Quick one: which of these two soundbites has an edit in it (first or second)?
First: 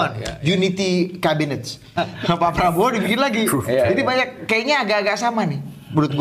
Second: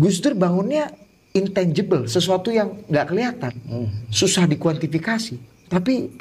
first